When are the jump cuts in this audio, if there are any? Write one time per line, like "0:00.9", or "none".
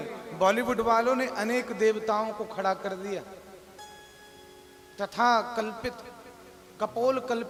none